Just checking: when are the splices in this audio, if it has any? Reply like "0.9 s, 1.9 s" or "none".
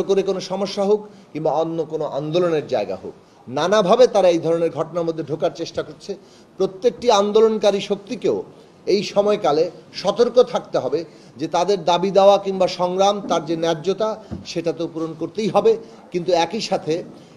none